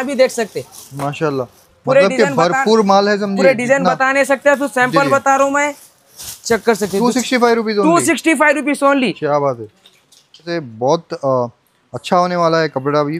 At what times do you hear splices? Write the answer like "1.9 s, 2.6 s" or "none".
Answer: 10.5 s